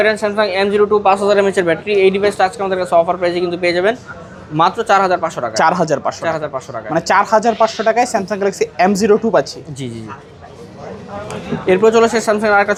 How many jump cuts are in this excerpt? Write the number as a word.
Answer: zero